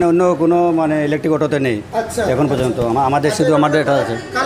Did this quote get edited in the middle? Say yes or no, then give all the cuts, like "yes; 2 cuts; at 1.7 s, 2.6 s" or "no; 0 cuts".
no; 0 cuts